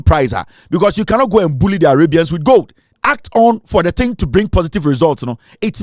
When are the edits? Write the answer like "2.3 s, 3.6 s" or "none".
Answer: 2.8 s